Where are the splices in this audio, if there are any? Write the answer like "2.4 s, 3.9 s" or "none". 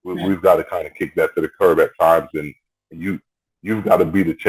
none